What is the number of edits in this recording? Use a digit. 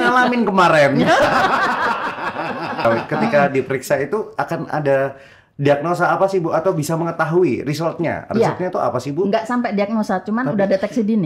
1